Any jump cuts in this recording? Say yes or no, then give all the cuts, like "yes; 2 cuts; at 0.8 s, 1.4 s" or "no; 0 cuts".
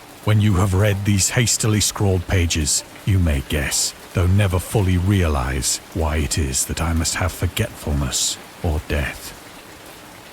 yes; 1 cut; at 9.2 s